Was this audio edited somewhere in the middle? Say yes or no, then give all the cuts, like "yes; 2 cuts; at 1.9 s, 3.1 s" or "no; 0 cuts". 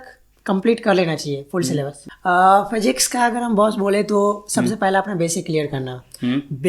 yes; 1 cut; at 2.0 s